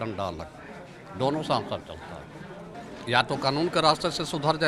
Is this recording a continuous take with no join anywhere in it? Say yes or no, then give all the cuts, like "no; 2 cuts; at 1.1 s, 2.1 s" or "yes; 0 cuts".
no; 1 cut; at 2.7 s